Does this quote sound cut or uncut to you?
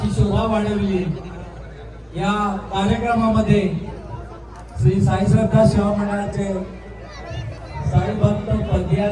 uncut